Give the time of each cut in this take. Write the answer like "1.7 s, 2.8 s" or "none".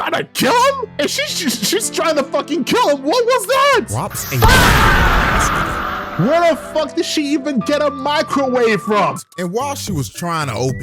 9.2 s